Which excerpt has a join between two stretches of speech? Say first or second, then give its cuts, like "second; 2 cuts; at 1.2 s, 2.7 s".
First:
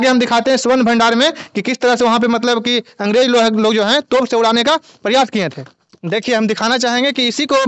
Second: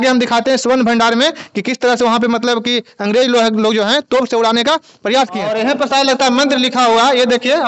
second; 1 cut; at 5.5 s